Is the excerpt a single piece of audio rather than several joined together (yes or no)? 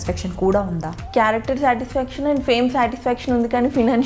no